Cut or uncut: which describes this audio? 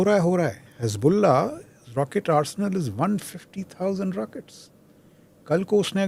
uncut